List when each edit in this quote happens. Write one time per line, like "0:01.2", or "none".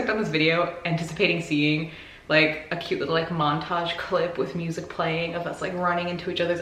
none